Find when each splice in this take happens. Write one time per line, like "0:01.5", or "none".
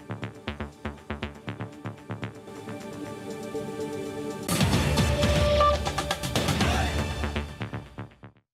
0:04.5